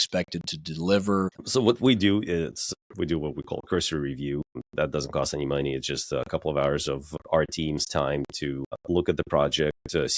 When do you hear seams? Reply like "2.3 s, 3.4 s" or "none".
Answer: 1.4 s, 2.7 s, 4.6 s, 7.1 s, 8.8 s

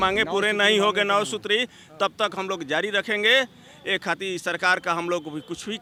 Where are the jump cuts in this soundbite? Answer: none

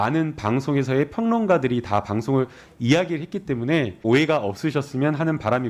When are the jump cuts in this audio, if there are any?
4.0 s

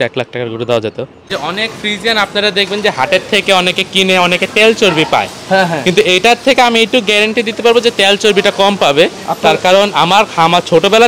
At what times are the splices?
1.3 s

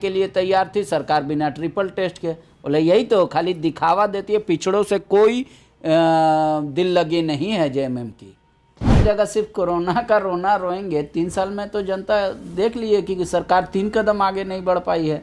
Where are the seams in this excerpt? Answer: 9.0 s

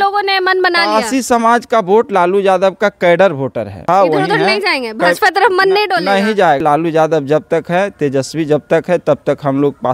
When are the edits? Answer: 3.8 s, 6.6 s

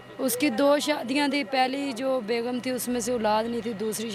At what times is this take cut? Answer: none

